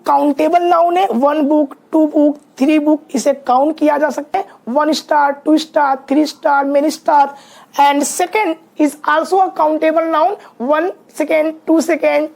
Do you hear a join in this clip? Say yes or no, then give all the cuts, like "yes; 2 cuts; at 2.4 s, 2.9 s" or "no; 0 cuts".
yes; 1 cut; at 4.3 s